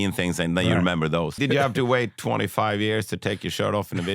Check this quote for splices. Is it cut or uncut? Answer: cut